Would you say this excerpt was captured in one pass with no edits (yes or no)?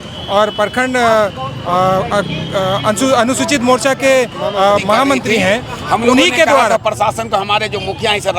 no